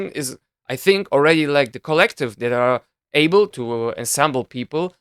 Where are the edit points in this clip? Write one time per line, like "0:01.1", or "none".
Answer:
0:03.6

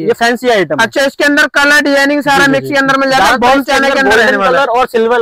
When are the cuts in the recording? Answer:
none

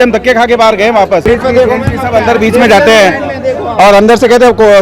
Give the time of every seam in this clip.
0:01.3

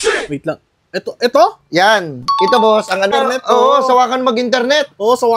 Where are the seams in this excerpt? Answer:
0:03.1

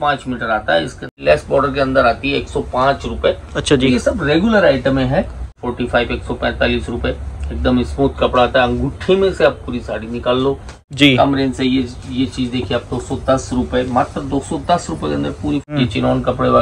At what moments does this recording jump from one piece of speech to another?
0:01.0
0:05.6
0:10.8
0:15.7

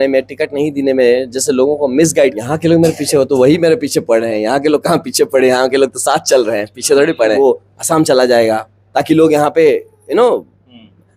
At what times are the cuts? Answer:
0:02.4
0:07.3

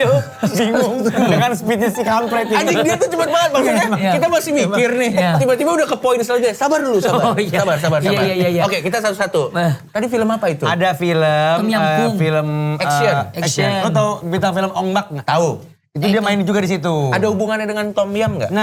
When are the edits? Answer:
none

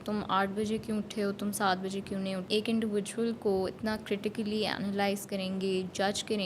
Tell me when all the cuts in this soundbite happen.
0:02.5

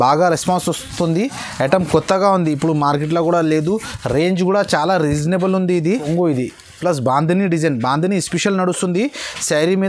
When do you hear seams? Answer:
0:06.1

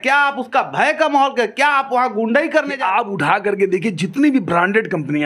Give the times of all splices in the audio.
0:02.7

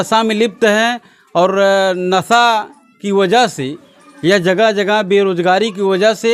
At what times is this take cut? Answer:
none

